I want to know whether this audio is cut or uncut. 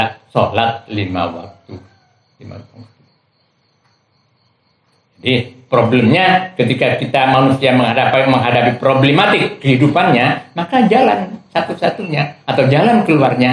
uncut